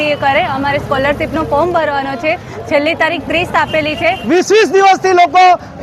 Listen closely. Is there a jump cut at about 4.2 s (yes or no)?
yes